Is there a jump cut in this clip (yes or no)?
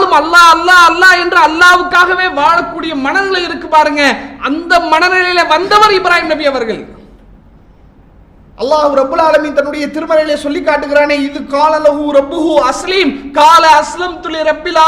no